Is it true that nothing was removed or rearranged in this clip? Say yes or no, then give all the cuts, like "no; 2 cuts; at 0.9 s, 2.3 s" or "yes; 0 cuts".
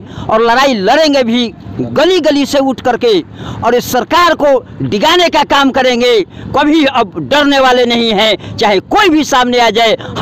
yes; 0 cuts